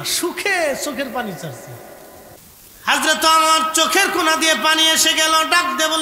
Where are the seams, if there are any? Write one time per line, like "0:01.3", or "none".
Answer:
0:02.4